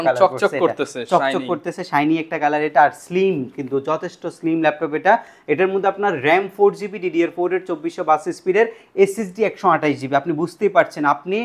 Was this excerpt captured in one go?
yes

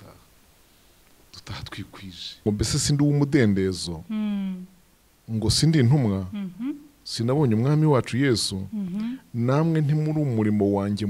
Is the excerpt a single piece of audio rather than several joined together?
no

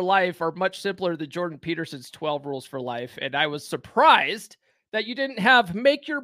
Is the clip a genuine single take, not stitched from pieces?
yes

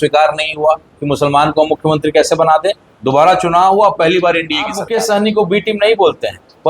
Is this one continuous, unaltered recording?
no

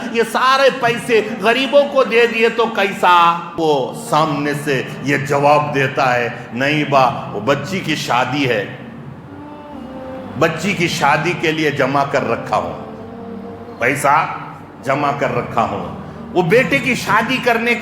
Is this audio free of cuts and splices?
no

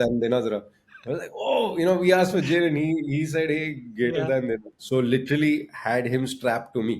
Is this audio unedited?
no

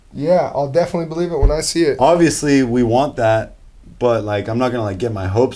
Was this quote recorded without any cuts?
no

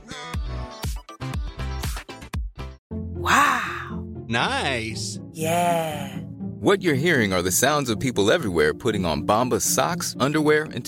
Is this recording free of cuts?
no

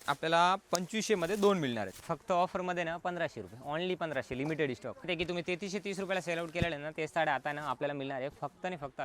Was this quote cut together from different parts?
yes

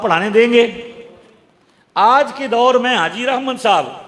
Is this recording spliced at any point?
no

